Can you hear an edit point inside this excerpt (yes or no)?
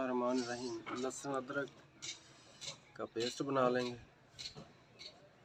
no